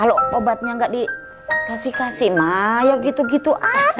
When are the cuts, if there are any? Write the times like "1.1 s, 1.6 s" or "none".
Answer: none